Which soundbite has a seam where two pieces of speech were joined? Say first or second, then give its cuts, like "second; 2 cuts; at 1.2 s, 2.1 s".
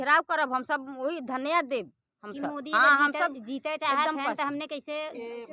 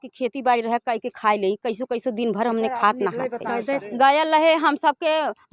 second; 1 cut; at 3.9 s